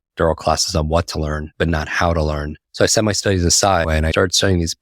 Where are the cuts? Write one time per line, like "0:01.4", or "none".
0:01.4
0:02.6
0:04.0